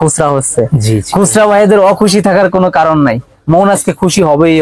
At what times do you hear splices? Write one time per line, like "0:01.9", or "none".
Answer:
none